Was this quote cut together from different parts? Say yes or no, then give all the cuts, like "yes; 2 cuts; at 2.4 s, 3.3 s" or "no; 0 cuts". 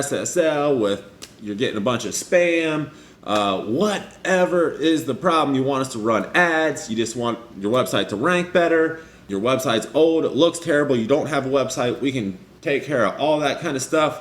yes; 1 cut; at 9.2 s